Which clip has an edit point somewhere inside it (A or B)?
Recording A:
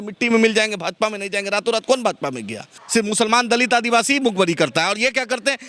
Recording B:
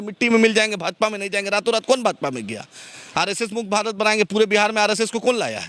A